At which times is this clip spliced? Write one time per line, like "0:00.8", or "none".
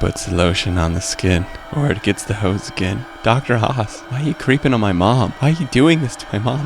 0:01.6
0:03.1
0:04.0
0:05.3